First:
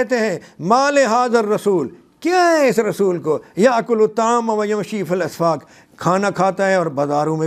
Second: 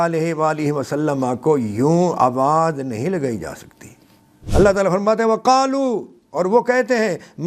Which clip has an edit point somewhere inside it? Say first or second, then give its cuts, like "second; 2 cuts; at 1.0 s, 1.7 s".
second; 1 cut; at 4.4 s